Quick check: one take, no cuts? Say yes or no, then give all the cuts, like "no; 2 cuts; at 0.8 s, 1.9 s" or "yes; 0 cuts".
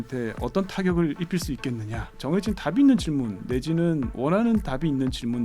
no; 2 cuts; at 2.2 s, 4.1 s